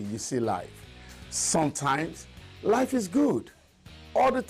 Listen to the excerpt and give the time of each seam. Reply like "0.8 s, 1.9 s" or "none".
2.8 s, 3.4 s